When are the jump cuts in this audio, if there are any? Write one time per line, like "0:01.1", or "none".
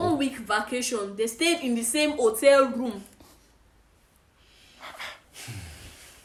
none